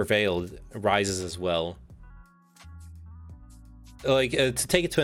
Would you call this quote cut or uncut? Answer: uncut